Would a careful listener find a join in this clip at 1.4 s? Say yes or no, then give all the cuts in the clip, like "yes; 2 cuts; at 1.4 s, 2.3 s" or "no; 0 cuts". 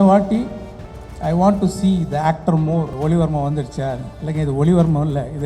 no; 1 cut; at 2.9 s